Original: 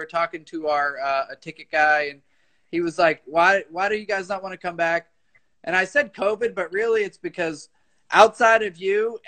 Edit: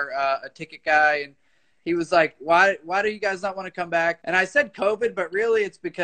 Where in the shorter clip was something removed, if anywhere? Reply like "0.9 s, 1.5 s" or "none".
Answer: 4.2 s